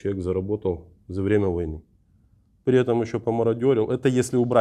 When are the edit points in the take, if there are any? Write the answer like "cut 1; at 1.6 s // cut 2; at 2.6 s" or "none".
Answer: none